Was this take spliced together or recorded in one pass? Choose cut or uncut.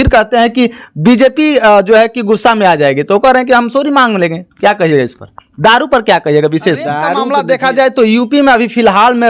cut